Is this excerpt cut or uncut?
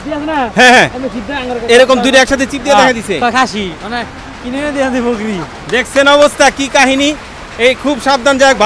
uncut